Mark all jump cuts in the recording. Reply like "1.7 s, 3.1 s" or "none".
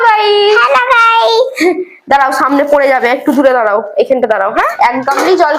4.7 s

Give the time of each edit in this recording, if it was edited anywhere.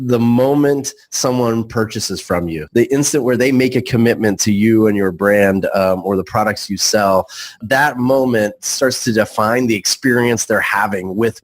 2.6 s, 7.6 s

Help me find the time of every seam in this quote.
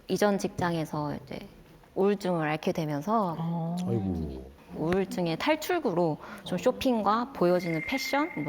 1.8 s, 4.5 s

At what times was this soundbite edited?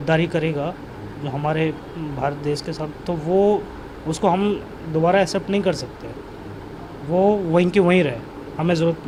none

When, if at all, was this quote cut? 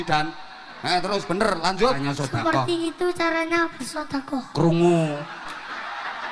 2.0 s

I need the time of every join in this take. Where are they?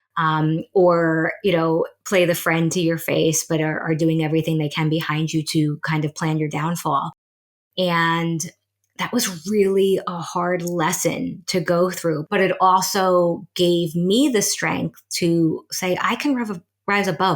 2.0 s, 12.2 s

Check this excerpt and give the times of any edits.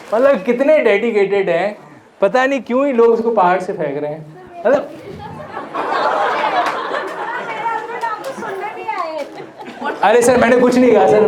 none

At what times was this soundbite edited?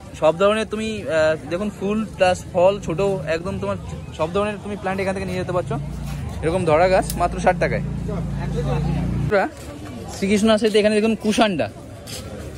none

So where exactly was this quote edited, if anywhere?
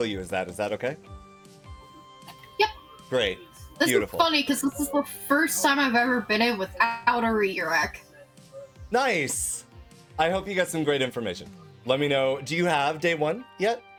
none

